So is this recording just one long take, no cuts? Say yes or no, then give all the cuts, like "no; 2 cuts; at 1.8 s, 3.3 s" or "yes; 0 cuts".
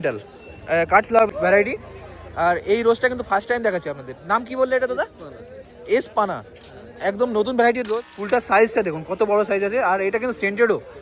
no; 2 cuts; at 1.3 s, 7.9 s